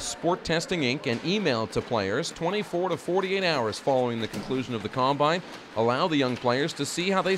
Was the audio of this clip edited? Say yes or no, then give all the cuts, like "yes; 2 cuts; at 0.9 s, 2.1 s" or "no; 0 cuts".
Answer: no; 0 cuts